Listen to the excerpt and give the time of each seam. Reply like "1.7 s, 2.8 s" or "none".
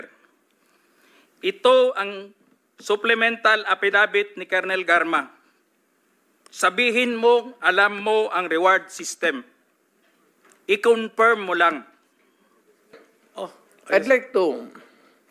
13.1 s